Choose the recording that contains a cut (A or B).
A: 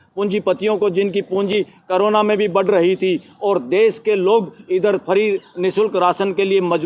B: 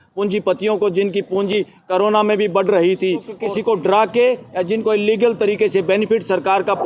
B